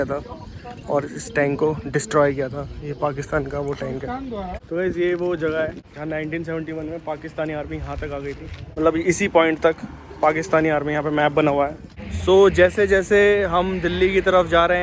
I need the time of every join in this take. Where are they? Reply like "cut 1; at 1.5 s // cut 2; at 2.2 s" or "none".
cut 1; at 4.6 s // cut 2; at 5.9 s // cut 3; at 8.6 s // cut 4; at 12.1 s